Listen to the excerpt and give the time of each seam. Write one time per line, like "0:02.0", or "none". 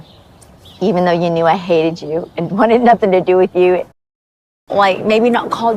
0:04.3